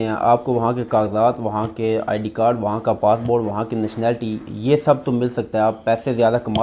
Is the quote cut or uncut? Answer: uncut